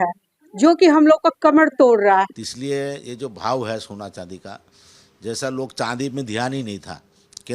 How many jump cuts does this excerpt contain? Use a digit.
1